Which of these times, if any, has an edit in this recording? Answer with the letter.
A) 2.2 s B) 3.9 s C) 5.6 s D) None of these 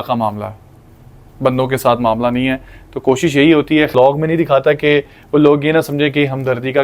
B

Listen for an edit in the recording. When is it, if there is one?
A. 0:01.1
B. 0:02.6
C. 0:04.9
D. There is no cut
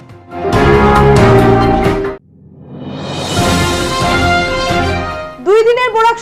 C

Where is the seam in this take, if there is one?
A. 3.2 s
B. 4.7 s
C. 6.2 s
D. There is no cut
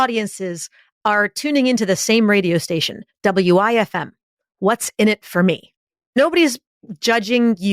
C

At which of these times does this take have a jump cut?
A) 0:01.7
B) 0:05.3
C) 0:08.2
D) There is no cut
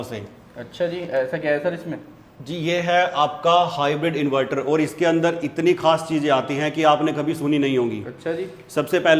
D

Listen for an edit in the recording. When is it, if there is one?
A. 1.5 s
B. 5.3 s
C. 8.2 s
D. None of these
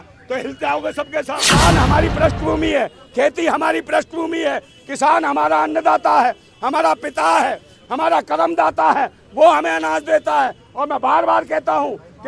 A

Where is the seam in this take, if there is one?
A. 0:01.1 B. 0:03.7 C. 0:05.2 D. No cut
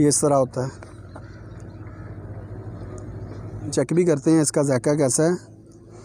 B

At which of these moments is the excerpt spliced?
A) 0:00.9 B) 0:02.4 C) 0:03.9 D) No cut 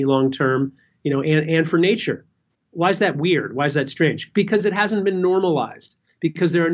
D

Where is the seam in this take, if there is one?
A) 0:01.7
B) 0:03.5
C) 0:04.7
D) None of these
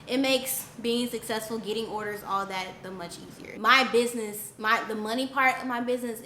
B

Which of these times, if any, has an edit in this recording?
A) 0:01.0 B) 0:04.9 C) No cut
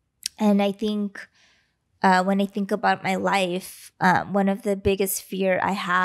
C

